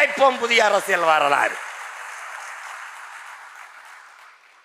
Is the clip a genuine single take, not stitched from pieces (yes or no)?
yes